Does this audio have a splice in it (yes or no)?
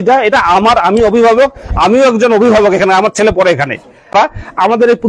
yes